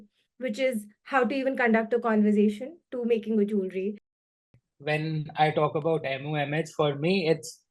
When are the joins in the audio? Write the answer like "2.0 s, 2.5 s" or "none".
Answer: 4.4 s